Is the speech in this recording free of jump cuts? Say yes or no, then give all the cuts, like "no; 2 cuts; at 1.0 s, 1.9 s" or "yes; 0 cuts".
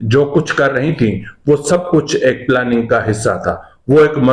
yes; 0 cuts